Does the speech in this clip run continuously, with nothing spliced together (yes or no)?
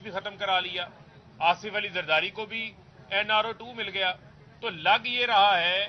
yes